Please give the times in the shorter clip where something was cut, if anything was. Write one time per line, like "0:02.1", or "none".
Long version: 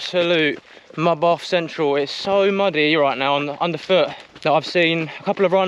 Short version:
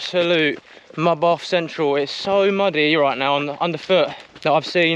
none